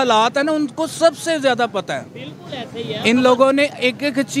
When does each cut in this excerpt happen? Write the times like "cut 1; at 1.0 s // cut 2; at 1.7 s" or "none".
none